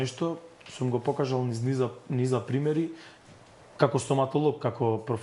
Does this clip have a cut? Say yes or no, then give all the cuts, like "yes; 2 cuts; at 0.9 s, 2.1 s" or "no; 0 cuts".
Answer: no; 0 cuts